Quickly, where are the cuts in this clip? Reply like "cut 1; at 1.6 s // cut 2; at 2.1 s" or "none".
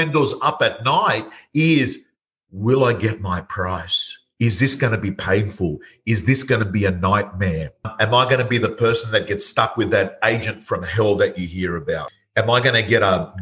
cut 1; at 7.9 s // cut 2; at 12.1 s